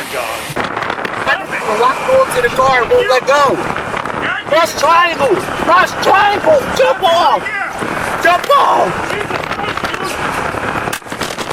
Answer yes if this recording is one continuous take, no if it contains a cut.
yes